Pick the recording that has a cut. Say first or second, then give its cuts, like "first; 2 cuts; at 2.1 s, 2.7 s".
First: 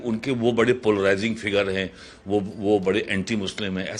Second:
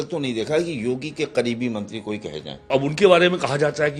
second; 1 cut; at 2.7 s